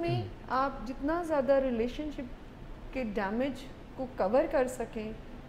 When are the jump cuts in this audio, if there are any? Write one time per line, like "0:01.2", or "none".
none

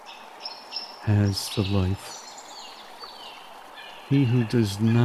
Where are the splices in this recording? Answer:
0:02.0
0:03.6

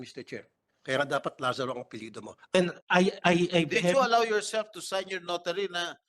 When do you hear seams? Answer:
0:02.5

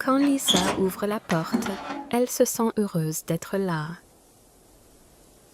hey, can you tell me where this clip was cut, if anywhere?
0:04.0

